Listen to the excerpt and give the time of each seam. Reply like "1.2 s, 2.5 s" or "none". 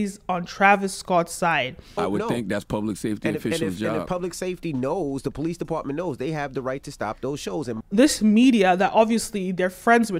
1.8 s, 7.8 s

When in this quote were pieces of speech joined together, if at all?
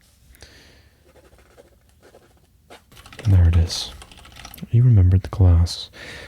3.0 s

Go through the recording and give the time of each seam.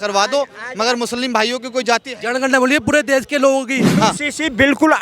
3.9 s

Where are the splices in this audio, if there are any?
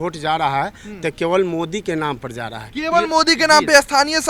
none

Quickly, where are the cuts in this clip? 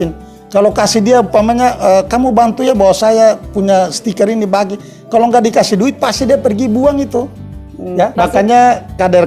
8.2 s

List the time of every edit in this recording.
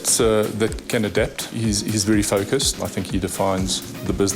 1.4 s, 2.9 s

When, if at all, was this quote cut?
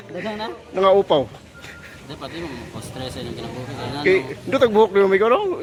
none

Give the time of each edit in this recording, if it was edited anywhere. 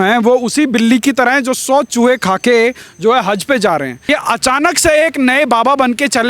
4.0 s

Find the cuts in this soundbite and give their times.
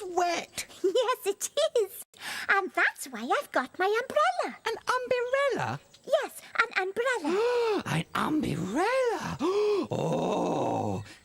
7.7 s

